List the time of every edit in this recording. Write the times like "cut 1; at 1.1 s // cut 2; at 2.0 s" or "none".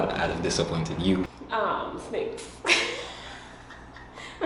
cut 1; at 1.4 s